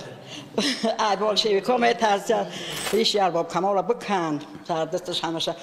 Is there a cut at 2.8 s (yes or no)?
yes